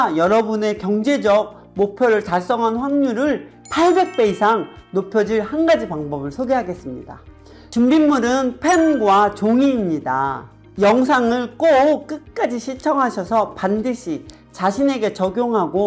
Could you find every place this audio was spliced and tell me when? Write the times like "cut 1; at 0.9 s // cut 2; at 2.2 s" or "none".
none